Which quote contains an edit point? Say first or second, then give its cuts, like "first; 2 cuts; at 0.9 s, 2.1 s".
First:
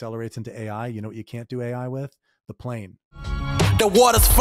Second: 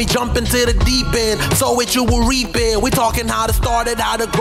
first; 1 cut; at 3.0 s